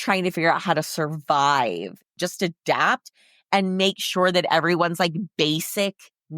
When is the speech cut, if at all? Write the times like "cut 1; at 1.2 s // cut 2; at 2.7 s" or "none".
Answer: cut 1; at 2.1 s